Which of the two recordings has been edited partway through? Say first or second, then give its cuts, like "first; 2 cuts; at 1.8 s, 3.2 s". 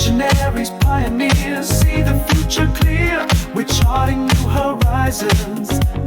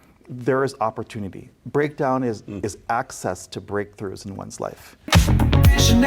second; 1 cut; at 4.9 s